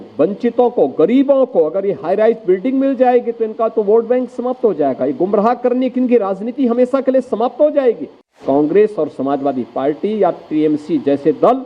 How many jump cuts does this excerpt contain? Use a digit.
1